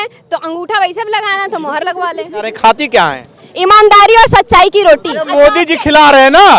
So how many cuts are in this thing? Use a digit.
2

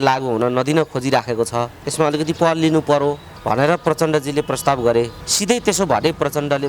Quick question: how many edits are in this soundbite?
3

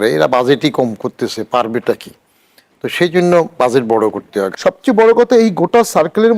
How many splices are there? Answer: 1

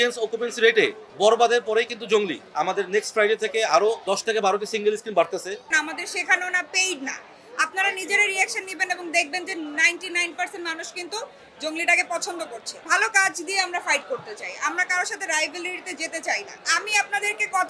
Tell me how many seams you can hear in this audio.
4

